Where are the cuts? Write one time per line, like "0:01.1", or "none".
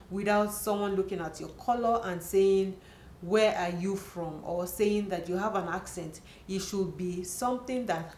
none